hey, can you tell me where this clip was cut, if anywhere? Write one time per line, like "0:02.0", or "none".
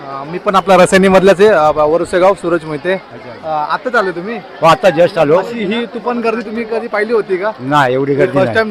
none